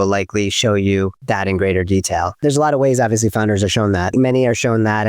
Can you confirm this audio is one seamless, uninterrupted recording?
no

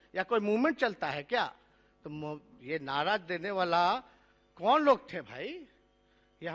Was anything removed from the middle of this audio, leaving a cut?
no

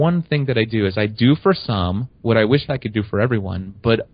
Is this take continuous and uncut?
yes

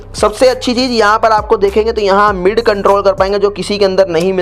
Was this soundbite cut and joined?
no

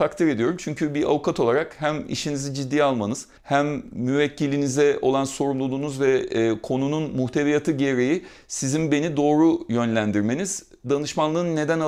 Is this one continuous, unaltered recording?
yes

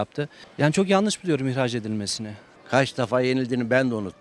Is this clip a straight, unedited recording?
no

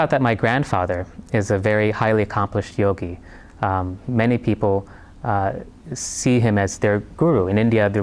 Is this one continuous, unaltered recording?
yes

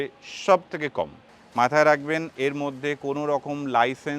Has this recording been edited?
yes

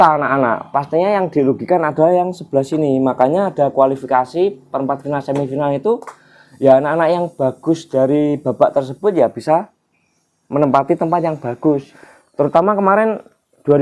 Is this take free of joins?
no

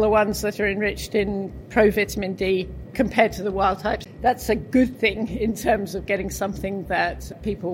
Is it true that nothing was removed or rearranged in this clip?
no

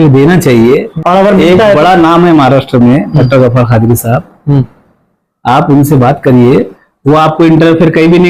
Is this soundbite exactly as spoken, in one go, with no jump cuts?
no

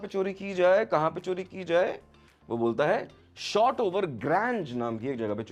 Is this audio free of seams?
yes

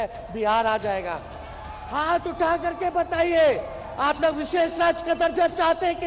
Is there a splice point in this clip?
no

